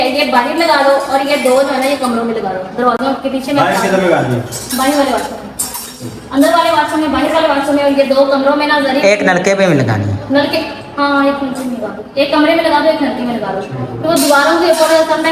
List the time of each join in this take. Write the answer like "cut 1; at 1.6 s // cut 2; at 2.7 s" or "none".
none